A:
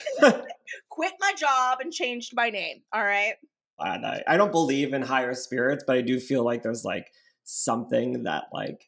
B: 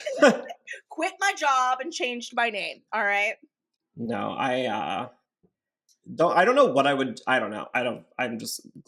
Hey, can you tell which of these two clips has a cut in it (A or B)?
A